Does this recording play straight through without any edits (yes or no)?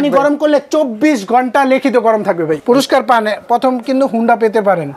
no